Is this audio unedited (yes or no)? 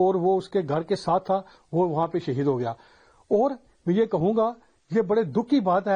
yes